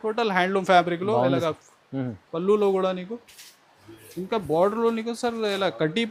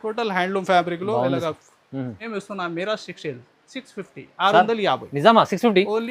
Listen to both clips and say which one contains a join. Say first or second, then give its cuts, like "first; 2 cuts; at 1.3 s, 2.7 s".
second; 1 cut; at 2.2 s